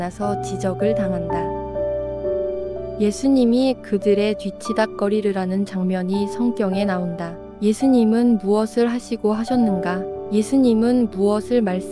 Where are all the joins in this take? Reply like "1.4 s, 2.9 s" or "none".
1.2 s, 2.8 s